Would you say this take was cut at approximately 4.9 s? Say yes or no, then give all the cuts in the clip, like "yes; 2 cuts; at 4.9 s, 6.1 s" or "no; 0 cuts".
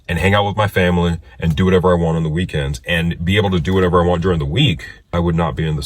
yes; 1 cut; at 4.9 s